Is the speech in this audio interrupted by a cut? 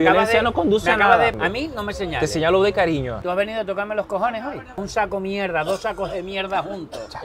yes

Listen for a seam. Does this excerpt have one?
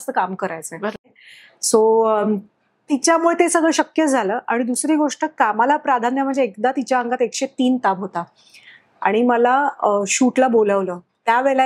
yes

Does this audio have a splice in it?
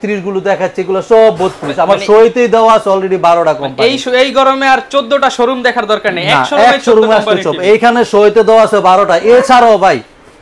no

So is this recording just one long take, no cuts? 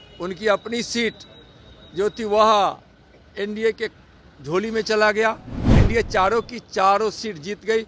yes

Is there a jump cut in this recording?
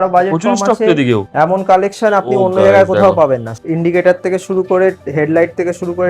yes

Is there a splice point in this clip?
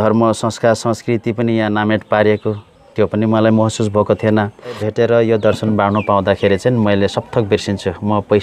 yes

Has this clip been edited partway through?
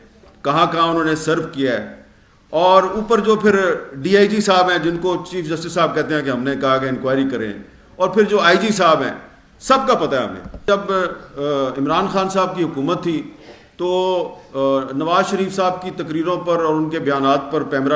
yes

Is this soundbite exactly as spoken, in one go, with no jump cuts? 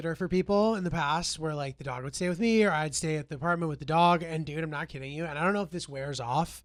yes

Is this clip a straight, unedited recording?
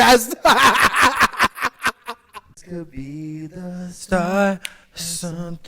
no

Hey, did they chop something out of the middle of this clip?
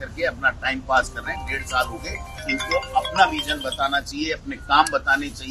no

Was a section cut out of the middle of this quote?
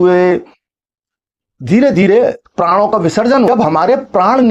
yes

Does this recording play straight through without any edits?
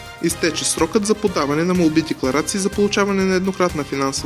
yes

